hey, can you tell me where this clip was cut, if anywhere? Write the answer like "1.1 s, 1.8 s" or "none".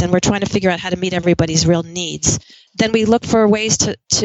2.6 s